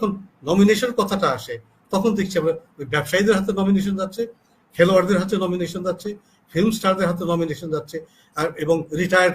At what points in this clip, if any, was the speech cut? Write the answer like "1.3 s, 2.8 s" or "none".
none